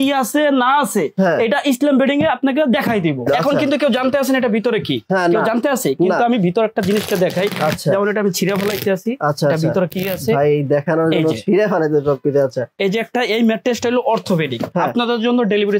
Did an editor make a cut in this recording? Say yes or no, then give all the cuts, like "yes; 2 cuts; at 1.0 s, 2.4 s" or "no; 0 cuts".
yes; 2 cuts; at 3.3 s, 14.7 s